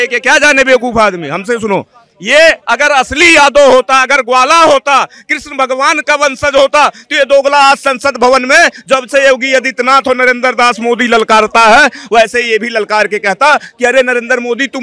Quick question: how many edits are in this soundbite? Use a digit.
0